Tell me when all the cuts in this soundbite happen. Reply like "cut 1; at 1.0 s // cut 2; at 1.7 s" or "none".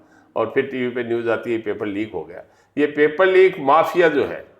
none